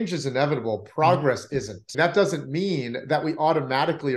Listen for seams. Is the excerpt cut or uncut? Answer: cut